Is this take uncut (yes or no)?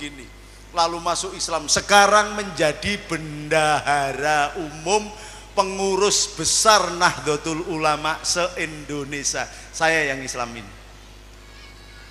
yes